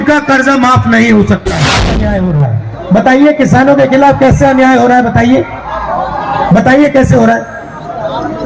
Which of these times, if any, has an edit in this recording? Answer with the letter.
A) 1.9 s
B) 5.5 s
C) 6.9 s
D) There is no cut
A